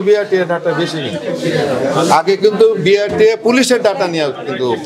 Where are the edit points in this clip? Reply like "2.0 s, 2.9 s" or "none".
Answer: none